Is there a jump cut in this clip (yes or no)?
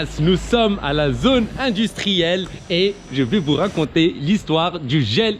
no